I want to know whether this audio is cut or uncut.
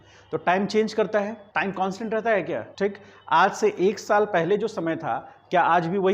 cut